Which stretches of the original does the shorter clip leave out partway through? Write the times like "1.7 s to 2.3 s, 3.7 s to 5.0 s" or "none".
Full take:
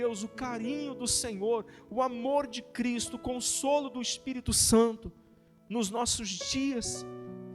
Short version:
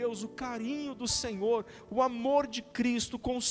none